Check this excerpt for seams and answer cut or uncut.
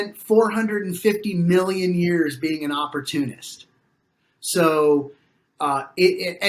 uncut